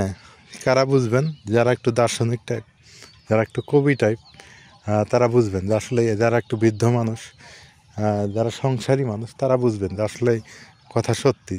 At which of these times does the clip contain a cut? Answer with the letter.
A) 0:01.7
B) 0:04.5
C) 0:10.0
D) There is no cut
D